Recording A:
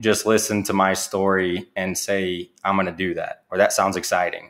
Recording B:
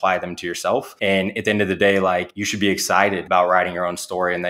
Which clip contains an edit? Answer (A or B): B